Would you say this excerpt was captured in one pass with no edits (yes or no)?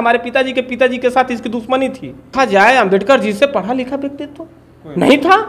no